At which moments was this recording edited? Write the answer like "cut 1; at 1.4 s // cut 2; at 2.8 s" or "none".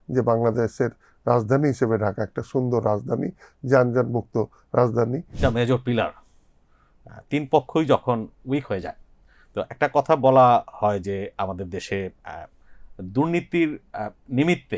cut 1; at 5.4 s